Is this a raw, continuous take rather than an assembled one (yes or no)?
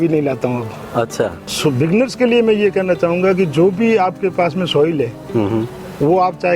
no